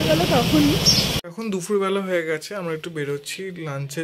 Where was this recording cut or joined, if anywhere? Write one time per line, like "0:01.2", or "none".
0:01.2